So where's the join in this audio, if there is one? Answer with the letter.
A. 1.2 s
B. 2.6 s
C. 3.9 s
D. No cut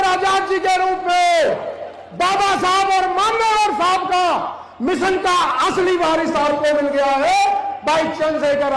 D